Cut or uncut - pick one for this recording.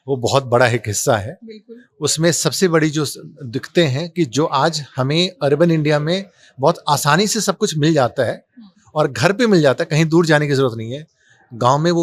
uncut